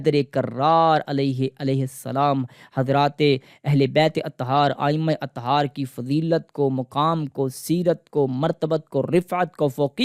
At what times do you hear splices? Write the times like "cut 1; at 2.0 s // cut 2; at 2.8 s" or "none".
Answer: none

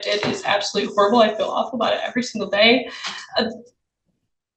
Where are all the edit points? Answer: none

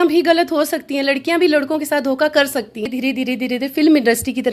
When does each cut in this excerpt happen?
cut 1; at 2.8 s

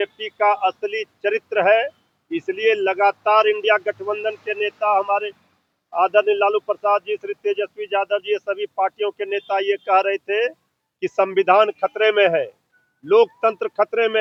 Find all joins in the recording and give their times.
none

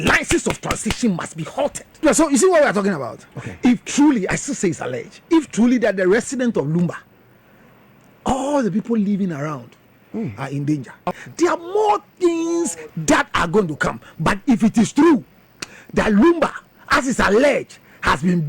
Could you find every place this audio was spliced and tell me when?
cut 1; at 1.9 s // cut 2; at 11.2 s

